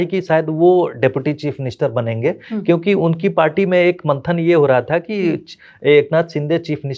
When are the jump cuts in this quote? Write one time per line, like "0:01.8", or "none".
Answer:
none

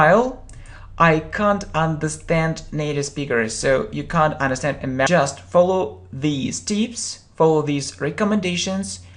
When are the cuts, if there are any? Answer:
none

